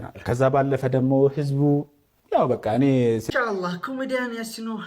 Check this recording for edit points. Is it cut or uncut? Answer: cut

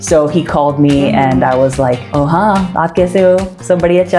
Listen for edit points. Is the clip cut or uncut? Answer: uncut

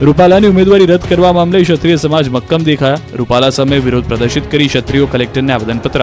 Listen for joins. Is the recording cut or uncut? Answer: cut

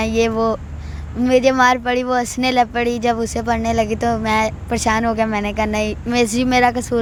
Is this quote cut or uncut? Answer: uncut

